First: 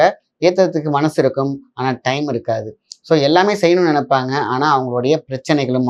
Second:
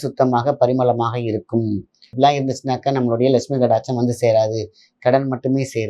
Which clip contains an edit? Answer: second; 1 cut; at 2.1 s

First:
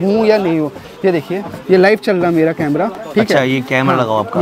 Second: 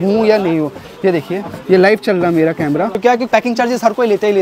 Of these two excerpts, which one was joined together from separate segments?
second; 1 cut; at 2.9 s

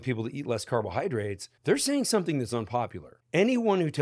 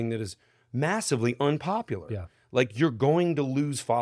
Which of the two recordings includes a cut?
first; 2 cuts; at 1.4 s, 3.1 s

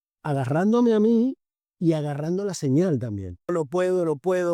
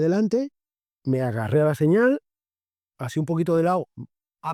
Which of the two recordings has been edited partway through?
first; 1 cut; at 3.5 s

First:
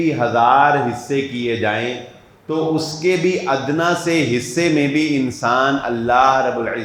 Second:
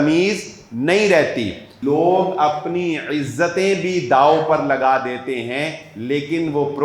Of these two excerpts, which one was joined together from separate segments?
second; 1 cut; at 1.7 s

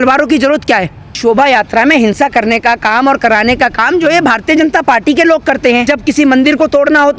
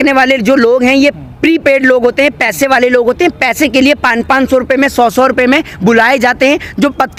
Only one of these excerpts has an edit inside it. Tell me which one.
first; 2 cuts; at 1.2 s, 5.8 s

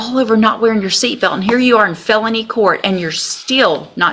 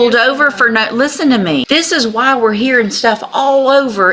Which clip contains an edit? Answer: second; 1 cut; at 1.6 s

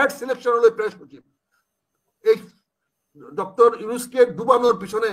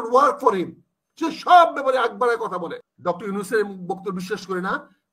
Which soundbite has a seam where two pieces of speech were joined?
second; 1 cut; at 2.8 s

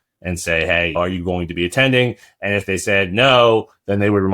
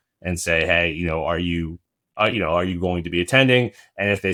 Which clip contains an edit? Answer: first; 1 cut; at 0.9 s

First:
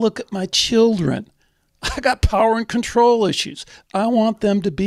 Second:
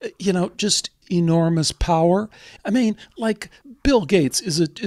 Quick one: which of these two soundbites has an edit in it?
second; 3 cuts; at 1.0 s, 2.5 s, 3.6 s

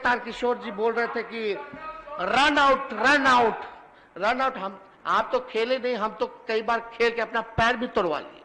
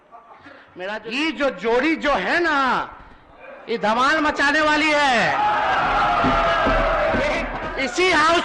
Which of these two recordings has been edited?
second; 2 cuts; at 0.9 s, 7.5 s

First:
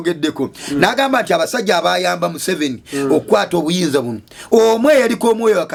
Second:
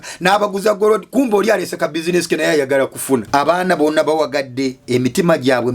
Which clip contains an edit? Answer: second; 1 cut; at 3.3 s

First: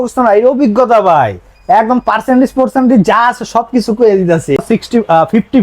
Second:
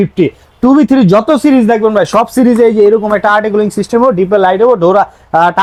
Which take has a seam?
first; 1 cut; at 4.6 s

